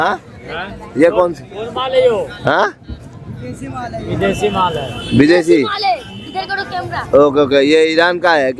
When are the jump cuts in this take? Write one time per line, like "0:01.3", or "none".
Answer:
none